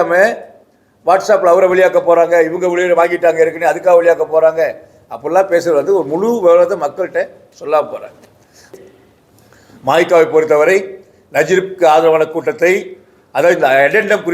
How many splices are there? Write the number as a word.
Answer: one